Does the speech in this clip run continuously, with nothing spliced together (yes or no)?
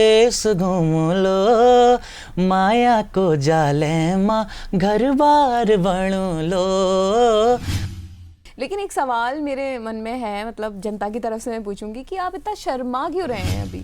no